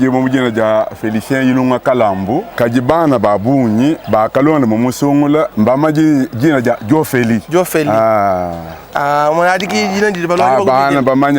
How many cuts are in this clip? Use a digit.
4